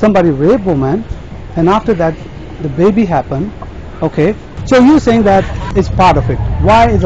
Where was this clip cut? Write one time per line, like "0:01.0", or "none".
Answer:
0:04.5
0:05.7